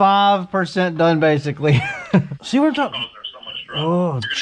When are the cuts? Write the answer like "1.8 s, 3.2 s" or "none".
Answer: 2.4 s